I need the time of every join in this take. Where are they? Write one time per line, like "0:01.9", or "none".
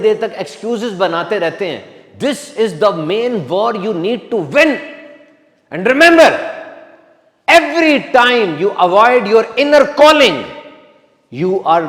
none